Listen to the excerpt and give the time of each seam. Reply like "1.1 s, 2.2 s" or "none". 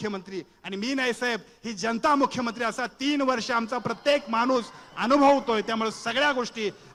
none

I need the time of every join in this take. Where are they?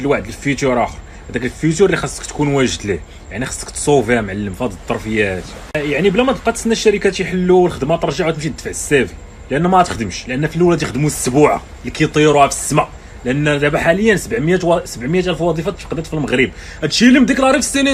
none

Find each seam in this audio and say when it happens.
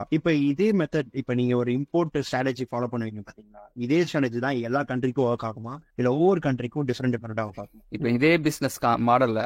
7.8 s

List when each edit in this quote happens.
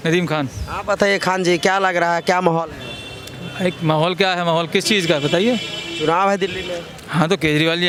none

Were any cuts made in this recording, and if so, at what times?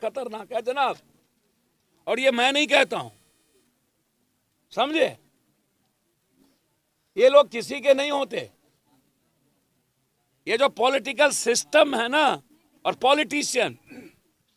none

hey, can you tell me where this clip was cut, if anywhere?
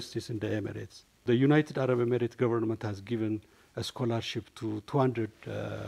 1.2 s

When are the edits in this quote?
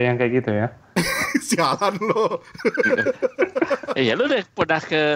none

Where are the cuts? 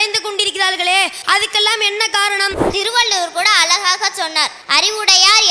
1.2 s, 2.7 s, 4.6 s

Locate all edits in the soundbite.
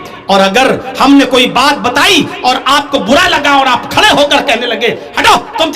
none

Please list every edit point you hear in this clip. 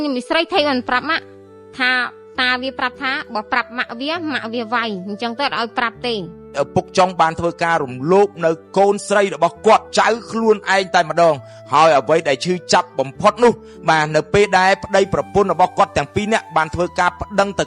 6.5 s, 9.9 s

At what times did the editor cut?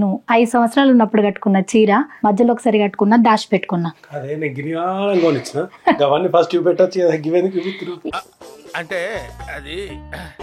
3.9 s

